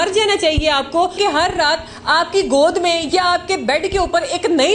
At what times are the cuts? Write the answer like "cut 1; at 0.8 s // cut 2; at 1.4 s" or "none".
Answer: cut 1; at 1.2 s